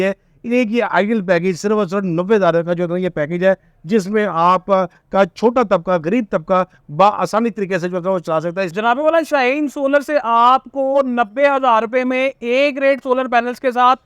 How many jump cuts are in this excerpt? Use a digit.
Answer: 1